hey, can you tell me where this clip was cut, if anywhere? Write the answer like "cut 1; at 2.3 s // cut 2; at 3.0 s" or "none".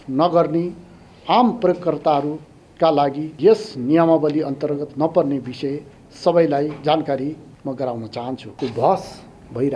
cut 1; at 3.3 s // cut 2; at 7.5 s // cut 3; at 8.5 s